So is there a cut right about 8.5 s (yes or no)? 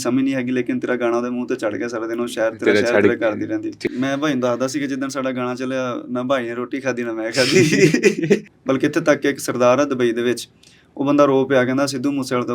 yes